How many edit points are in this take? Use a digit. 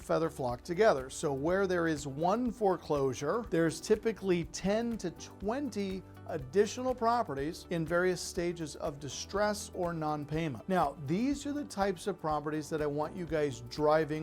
3